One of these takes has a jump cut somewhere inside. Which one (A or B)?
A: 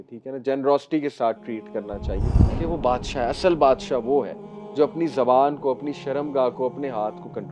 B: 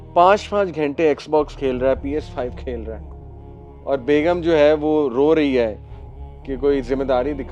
A